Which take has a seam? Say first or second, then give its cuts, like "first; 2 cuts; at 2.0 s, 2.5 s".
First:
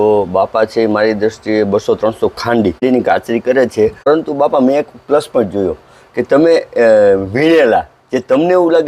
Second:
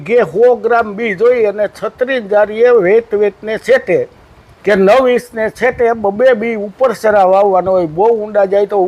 first; 2 cuts; at 2.8 s, 4.1 s